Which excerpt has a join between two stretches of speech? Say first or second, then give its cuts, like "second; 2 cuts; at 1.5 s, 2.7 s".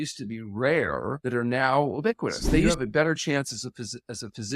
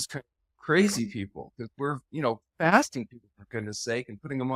first; 2 cuts; at 1.2 s, 2.7 s